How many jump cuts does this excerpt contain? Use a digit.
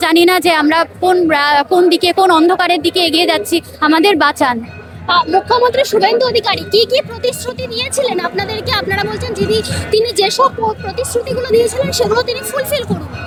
0